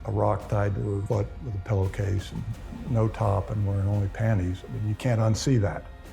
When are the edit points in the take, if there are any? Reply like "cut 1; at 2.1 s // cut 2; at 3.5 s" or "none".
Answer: cut 1; at 1.0 s